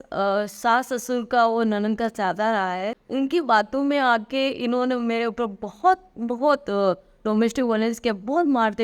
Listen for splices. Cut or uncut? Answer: cut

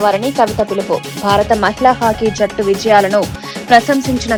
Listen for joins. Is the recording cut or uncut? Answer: uncut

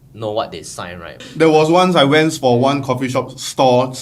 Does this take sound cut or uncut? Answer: cut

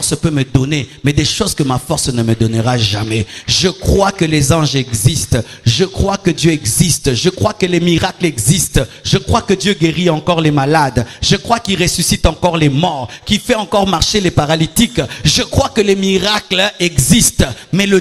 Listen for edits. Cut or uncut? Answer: uncut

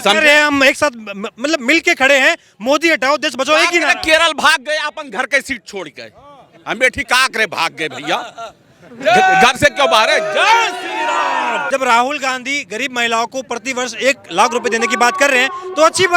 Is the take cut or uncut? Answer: cut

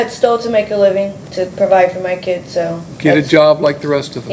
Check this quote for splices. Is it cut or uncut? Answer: uncut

